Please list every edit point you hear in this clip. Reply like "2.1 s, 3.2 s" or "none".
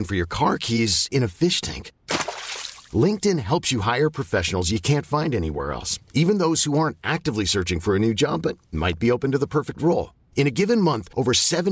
none